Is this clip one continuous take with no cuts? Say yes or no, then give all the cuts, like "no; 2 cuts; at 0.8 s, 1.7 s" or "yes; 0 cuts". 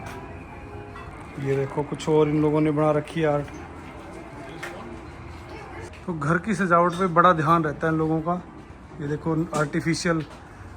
no; 2 cuts; at 1.1 s, 5.9 s